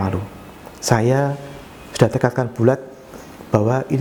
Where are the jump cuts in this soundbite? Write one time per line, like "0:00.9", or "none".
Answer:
none